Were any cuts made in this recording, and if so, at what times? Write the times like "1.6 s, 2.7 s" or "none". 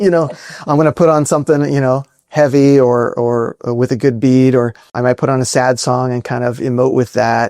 4.9 s